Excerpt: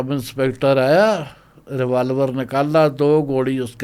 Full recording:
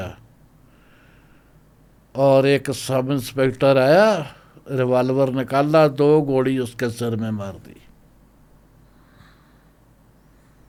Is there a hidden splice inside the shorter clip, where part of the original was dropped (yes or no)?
no